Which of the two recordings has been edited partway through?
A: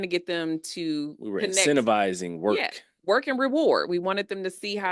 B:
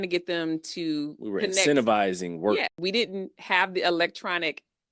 B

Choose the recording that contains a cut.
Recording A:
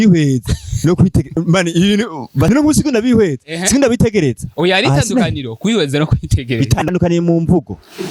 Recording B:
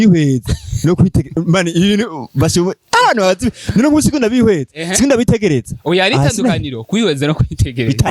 A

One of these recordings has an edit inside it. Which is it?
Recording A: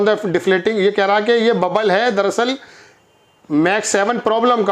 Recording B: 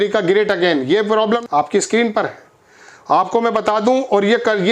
B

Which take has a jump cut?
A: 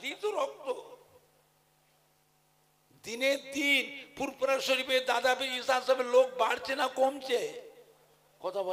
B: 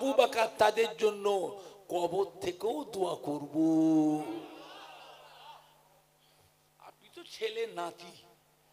A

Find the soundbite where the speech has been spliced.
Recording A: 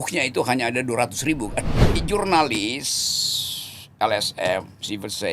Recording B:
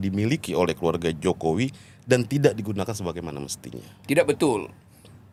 A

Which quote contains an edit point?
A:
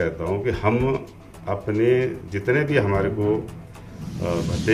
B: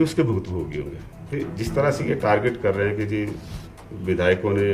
B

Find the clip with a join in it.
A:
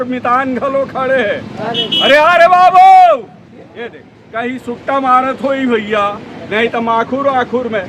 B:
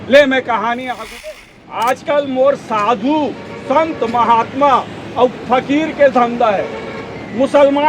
B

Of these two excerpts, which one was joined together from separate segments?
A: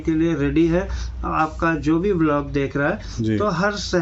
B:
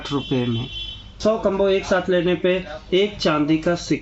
B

